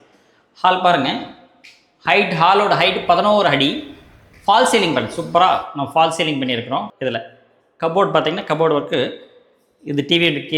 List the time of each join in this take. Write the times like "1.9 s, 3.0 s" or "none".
6.9 s